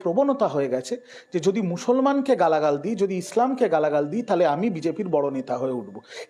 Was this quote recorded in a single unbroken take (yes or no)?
yes